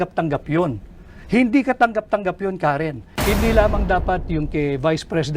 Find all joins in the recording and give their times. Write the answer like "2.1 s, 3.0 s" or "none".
3.1 s